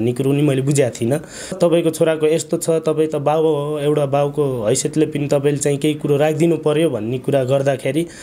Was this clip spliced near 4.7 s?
no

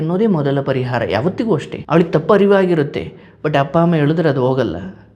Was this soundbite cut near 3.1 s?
no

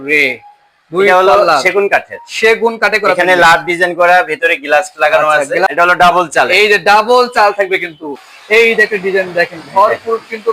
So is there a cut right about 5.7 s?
yes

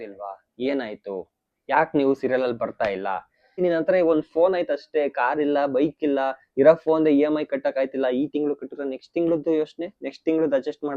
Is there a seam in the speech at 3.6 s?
yes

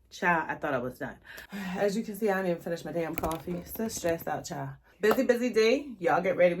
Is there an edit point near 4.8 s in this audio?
yes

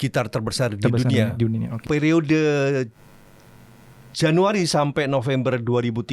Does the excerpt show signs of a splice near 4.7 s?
no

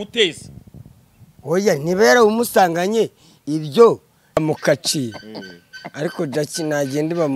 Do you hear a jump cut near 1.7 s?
no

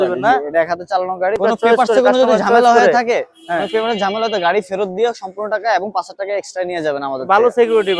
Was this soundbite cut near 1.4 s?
yes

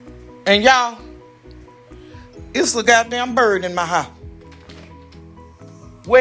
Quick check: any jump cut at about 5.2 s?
no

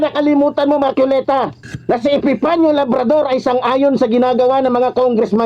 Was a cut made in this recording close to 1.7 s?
yes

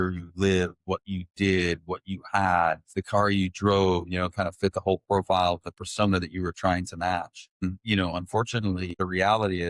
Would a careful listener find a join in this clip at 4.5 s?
no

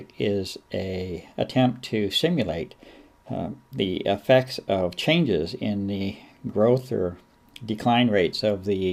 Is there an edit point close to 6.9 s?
yes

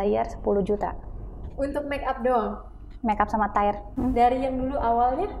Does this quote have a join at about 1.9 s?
no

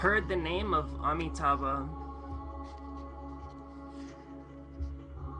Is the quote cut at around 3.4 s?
yes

